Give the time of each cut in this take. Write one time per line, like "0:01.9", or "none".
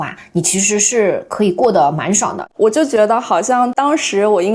0:02.4